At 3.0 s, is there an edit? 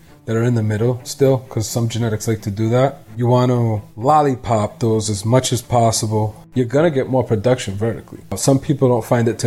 yes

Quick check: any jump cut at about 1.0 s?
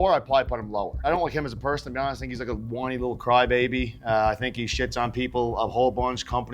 yes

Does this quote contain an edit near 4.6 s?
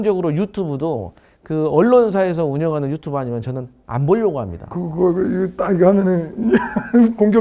yes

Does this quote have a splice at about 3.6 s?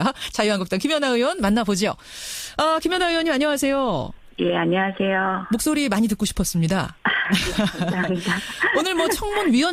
no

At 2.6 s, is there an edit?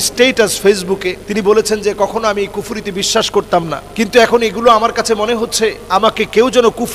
no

